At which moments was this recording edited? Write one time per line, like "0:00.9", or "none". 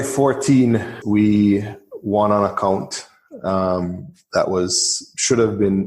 0:00.9

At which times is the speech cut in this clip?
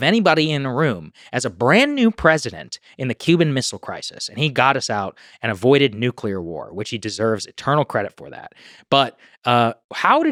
none

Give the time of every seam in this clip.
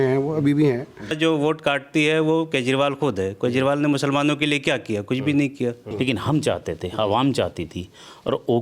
0:01.1
0:05.8

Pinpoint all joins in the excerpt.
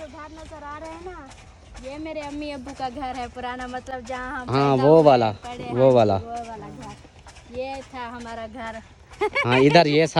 none

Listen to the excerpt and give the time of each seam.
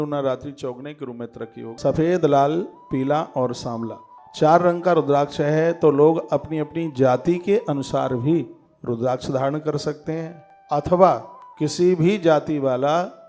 0:01.6

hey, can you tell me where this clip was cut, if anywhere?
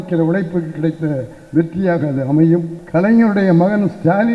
0:02.8

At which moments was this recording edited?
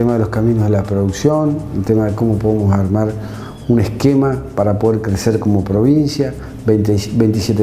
none

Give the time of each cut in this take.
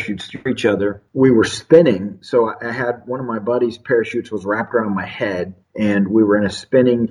0:01.0

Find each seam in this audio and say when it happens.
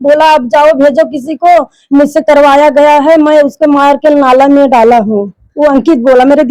none

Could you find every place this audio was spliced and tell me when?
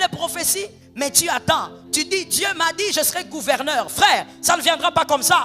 0:01.8

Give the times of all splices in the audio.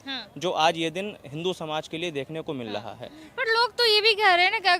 none

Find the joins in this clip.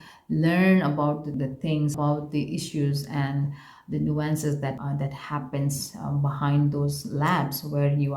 0:01.9
0:04.8

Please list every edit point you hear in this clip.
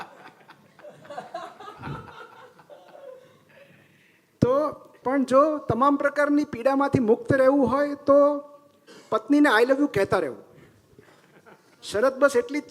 0:04.9

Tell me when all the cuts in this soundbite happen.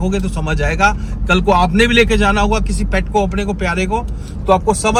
none

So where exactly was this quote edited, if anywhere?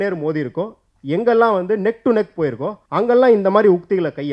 0:02.7

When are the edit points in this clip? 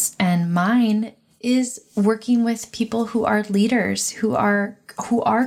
none

